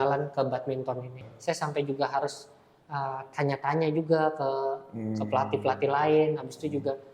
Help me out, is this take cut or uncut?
cut